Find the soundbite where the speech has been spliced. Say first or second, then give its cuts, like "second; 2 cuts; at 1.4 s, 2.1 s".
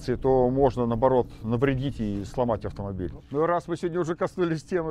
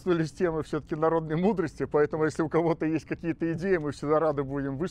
first; 1 cut; at 3.2 s